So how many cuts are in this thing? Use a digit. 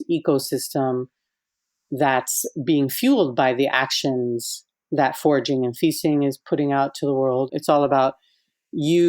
1